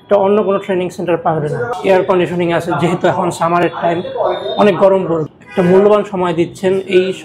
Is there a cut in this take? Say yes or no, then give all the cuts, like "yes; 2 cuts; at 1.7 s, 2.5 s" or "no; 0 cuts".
yes; 2 cuts; at 1.8 s, 5.4 s